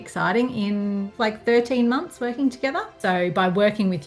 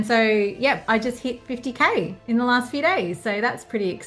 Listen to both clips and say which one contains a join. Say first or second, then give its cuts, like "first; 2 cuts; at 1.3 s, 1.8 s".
first; 2 cuts; at 1.1 s, 2.9 s